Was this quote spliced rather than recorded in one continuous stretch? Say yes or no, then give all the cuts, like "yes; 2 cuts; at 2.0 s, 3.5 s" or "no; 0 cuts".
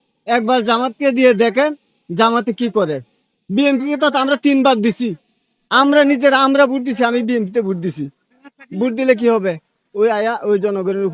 no; 0 cuts